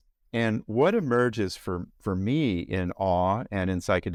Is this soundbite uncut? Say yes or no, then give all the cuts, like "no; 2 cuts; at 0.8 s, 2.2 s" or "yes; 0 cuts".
yes; 0 cuts